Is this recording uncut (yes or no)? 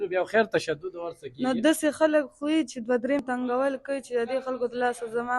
no